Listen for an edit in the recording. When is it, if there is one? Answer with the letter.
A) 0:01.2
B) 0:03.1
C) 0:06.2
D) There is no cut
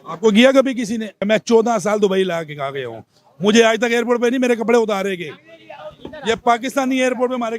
A